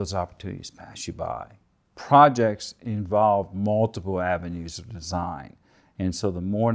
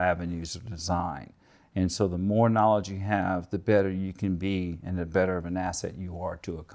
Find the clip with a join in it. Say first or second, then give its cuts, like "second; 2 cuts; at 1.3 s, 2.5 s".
first; 1 cut; at 1.5 s